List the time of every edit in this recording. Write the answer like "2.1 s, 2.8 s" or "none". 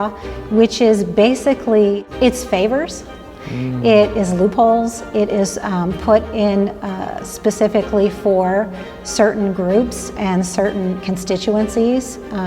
2.1 s

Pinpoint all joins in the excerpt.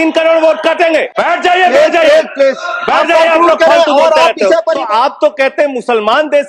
1.1 s, 4.8 s

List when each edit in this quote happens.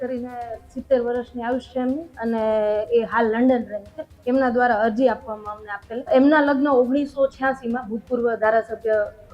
6.1 s

